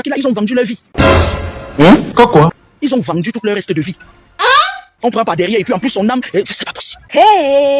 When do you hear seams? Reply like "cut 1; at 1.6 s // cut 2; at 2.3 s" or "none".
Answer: none